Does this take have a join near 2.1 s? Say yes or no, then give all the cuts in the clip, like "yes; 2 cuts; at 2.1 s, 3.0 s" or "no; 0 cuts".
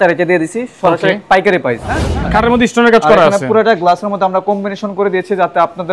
yes; 1 cut; at 2.1 s